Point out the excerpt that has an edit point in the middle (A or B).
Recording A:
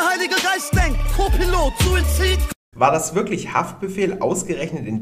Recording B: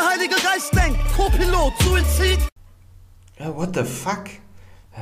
A